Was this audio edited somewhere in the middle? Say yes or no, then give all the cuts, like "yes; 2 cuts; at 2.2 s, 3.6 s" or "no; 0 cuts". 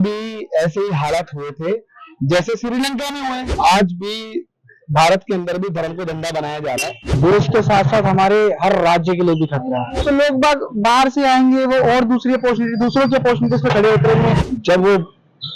yes; 4 cuts; at 3.5 s, 7.0 s, 9.9 s, 14.4 s